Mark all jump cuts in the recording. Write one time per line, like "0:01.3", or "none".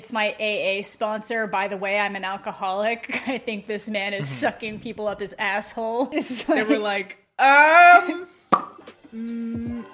0:06.1